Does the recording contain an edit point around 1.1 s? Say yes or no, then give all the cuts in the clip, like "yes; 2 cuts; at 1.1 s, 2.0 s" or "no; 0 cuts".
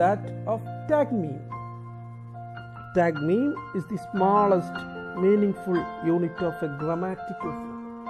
no; 1 cut; at 7.2 s